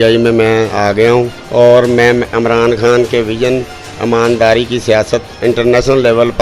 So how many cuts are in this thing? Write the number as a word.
one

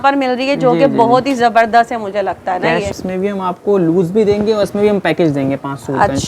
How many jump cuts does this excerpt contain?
one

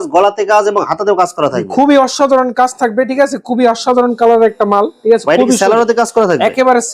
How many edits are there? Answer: zero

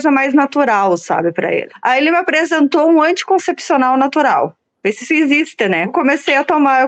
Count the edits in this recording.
two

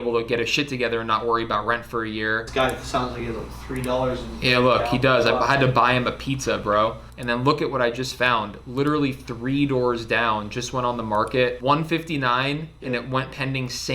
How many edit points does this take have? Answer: three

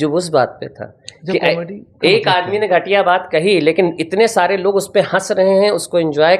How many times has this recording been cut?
zero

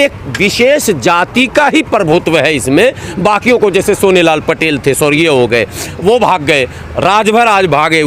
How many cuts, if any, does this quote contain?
zero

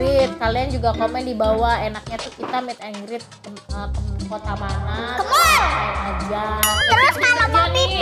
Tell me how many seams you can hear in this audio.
one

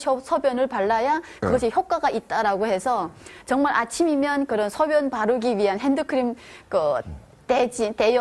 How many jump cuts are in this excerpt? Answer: one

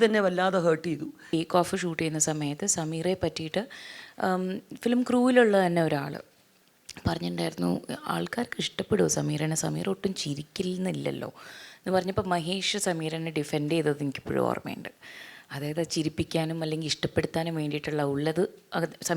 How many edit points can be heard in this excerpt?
one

